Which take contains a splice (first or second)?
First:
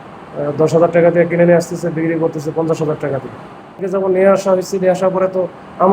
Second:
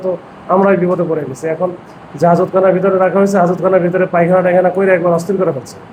first